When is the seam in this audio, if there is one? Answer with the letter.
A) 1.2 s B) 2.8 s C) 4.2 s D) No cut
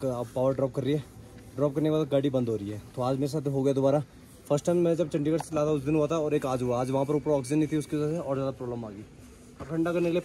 D